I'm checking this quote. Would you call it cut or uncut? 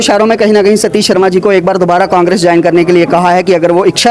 uncut